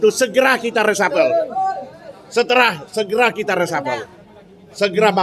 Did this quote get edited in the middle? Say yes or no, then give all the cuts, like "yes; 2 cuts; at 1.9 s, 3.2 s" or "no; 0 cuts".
no; 0 cuts